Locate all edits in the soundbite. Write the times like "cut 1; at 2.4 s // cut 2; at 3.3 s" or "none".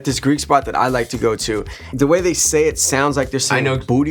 none